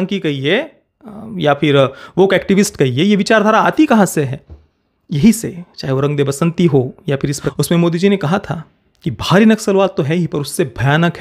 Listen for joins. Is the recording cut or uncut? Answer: cut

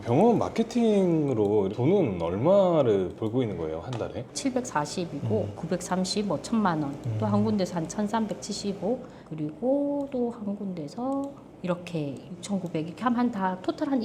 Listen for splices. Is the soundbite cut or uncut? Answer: cut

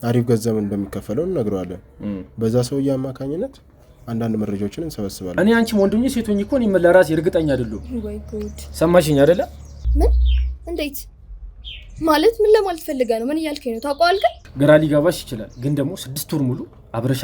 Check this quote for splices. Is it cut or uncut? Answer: cut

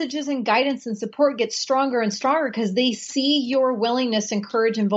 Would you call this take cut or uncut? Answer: uncut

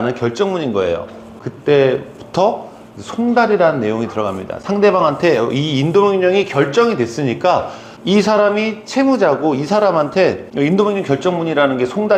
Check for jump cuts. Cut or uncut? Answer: uncut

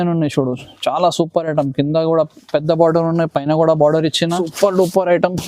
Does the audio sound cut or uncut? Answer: cut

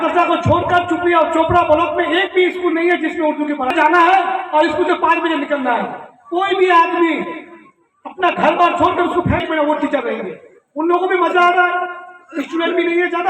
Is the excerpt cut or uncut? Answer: cut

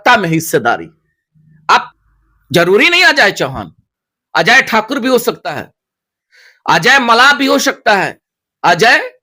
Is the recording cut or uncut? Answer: cut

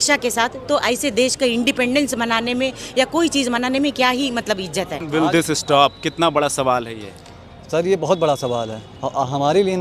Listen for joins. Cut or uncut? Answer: cut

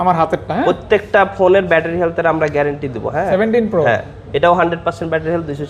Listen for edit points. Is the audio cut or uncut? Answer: cut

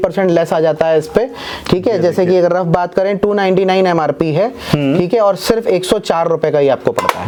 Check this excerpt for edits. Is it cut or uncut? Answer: uncut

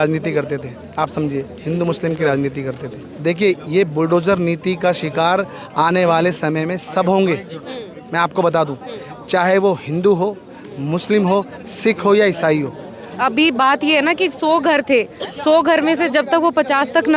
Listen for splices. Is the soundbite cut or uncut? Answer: cut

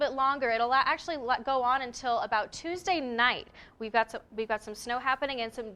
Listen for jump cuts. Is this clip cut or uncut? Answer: uncut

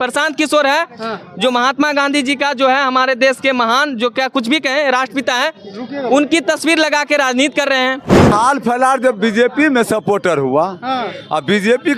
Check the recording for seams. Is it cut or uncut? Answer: cut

